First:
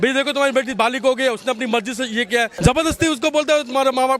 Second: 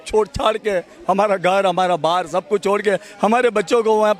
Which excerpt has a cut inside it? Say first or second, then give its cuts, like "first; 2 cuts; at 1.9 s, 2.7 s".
first; 1 cut; at 2.5 s